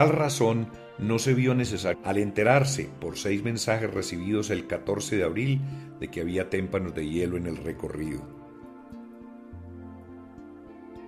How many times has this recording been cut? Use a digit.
0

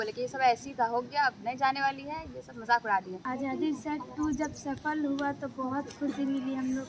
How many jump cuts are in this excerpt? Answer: 1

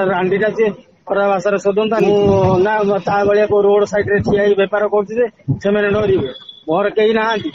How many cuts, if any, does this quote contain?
1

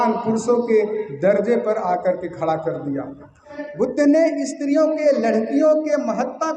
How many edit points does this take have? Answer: 1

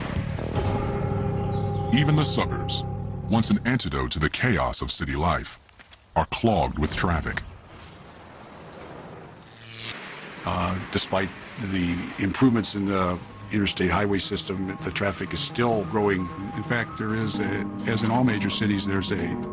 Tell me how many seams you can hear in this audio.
1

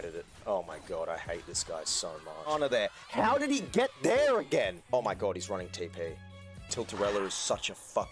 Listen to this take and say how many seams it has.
2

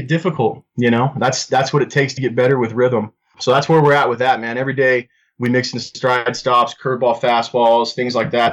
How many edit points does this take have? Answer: 0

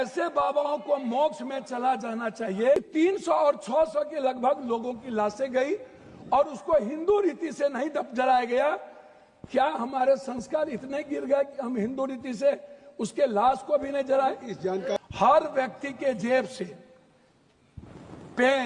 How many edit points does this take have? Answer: 2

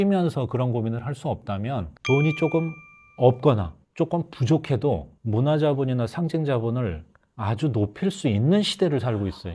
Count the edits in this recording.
1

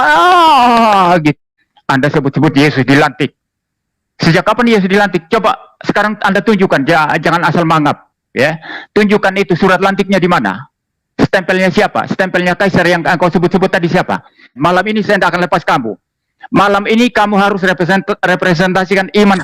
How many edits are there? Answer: 2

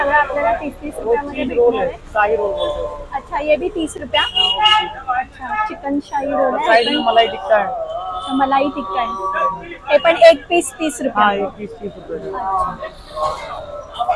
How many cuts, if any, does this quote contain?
0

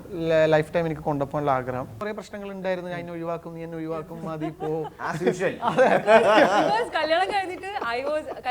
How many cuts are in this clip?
1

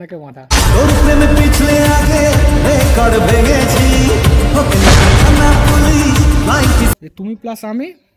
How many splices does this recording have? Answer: 1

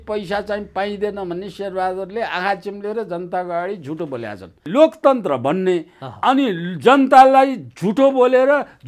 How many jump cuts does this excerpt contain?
1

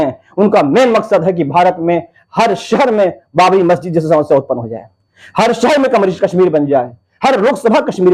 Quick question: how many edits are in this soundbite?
0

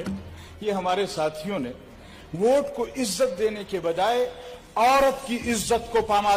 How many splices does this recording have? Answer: 0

